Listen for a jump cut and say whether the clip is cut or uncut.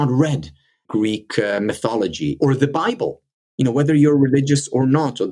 cut